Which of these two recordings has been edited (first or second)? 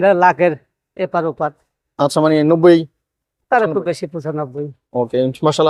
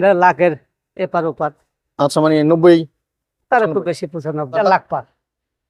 second